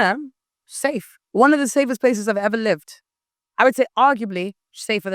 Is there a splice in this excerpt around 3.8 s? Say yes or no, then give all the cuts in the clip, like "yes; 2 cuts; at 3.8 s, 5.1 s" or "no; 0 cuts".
no; 1 cut; at 1.1 s